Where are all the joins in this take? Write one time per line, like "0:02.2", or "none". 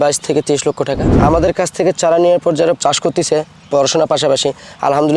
0:01.1
0:02.8